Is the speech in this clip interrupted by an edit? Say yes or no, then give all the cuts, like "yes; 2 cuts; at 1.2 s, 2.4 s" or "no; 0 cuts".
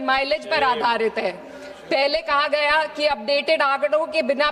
no; 0 cuts